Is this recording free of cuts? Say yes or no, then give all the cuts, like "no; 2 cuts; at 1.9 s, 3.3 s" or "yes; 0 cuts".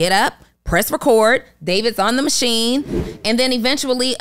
no; 1 cut; at 3.0 s